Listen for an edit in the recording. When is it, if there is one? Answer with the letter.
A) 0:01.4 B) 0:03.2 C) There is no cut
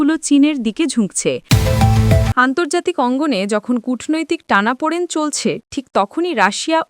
A